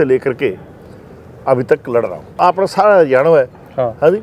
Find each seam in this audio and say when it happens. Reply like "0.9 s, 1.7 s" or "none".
2.3 s